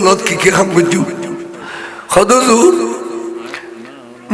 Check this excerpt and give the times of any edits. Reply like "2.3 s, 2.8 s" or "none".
none

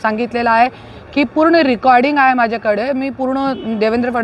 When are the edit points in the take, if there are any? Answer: none

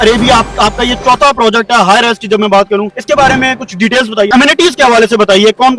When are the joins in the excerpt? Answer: none

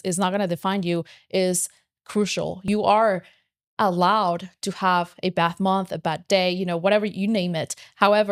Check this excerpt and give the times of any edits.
none

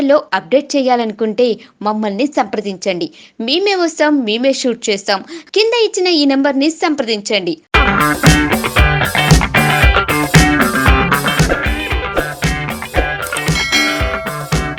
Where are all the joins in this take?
none

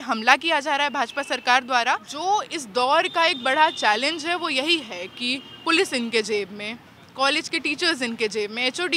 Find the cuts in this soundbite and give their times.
2.1 s

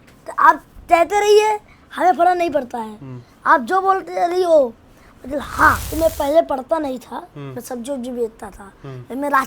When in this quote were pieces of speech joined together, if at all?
5.8 s

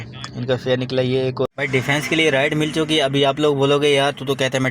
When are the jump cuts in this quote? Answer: 1.5 s

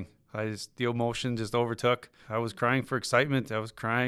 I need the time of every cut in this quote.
2.2 s

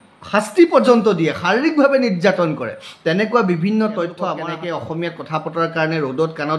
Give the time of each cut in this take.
4.4 s

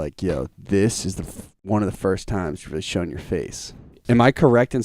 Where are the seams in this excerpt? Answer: 3.9 s

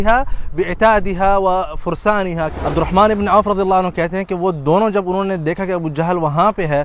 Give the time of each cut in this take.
2.5 s

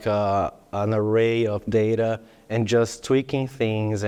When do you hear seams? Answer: none

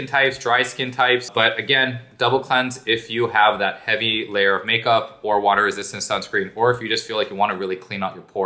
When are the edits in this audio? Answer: none

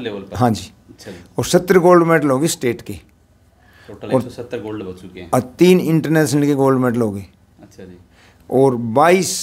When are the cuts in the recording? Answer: none

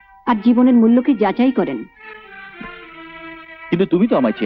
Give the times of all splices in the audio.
none

